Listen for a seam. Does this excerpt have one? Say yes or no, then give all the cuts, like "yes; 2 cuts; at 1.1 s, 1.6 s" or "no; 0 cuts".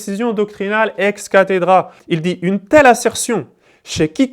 yes; 1 cut; at 2.0 s